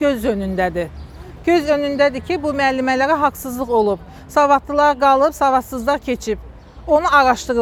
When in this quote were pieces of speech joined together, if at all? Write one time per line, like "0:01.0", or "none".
none